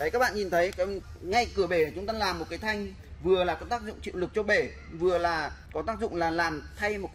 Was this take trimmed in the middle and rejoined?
yes; 2 cuts; at 1.1 s, 5.6 s

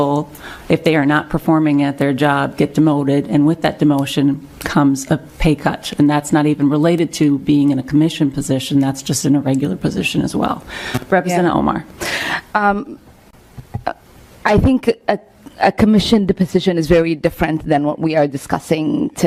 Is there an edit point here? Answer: no; 0 cuts

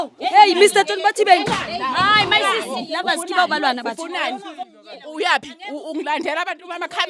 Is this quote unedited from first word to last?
yes; 0 cuts

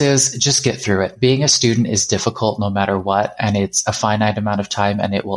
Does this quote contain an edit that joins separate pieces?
no; 0 cuts

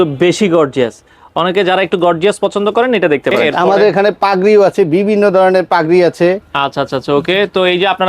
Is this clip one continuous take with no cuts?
no; 1 cut; at 3.5 s

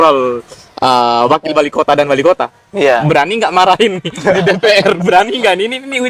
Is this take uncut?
yes; 0 cuts

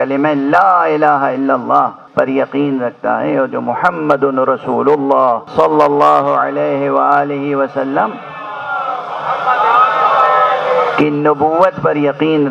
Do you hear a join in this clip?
yes; 2 cuts; at 2.0 s, 5.4 s

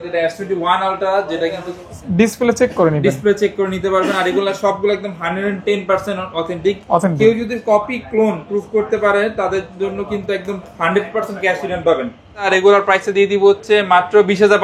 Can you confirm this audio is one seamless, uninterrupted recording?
no; 2 cuts; at 1.8 s, 12.5 s

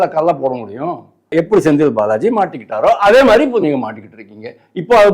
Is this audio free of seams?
no; 1 cut; at 1.3 s

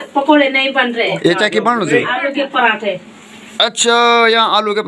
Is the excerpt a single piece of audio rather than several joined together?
yes; 0 cuts

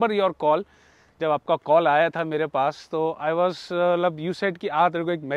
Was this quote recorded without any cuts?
yes; 0 cuts

